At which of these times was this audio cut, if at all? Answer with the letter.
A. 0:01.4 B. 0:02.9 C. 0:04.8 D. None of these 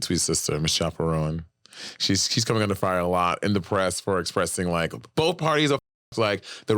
D